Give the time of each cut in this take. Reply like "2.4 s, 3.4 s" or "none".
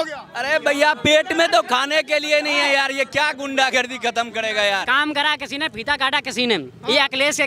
4.9 s